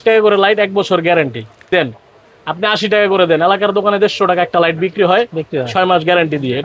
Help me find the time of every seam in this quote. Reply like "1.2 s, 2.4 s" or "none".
none